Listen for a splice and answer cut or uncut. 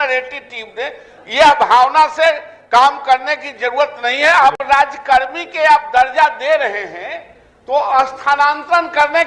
cut